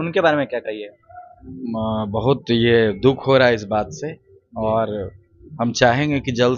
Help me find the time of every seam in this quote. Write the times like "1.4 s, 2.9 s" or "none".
none